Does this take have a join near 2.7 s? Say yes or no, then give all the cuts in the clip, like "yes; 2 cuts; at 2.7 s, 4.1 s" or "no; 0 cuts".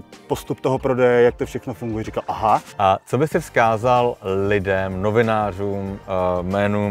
yes; 1 cut; at 2.7 s